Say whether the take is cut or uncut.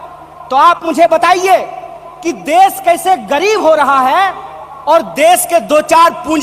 uncut